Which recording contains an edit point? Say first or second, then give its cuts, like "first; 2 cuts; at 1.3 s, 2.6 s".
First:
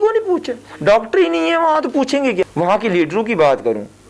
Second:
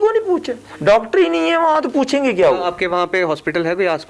first; 1 cut; at 2.4 s